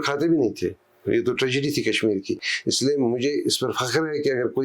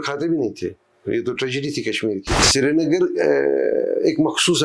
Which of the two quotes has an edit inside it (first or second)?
second